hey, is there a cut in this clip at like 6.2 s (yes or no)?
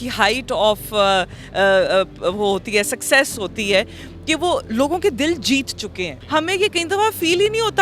yes